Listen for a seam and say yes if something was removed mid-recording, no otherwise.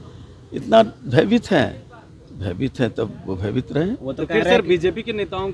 no